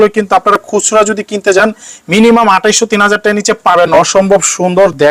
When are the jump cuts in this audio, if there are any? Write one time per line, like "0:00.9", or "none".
0:03.9